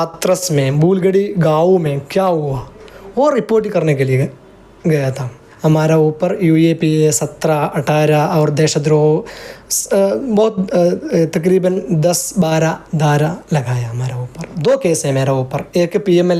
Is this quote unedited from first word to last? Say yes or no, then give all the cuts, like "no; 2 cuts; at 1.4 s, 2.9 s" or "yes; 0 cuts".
no; 2 cuts; at 5.4 s, 14.5 s